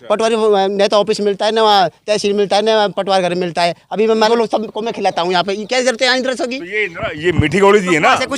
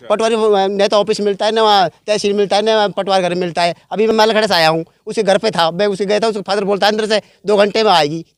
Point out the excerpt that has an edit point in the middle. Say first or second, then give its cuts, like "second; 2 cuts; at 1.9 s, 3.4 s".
first; 1 cut; at 4.1 s